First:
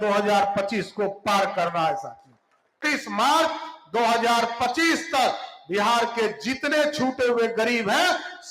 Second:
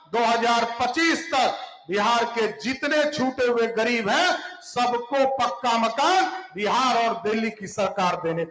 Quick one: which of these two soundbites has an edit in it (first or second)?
first